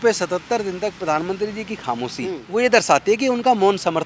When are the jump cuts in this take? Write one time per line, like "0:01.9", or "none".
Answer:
0:02.4